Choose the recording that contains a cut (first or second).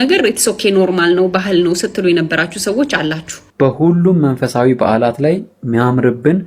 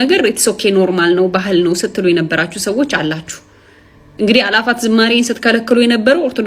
first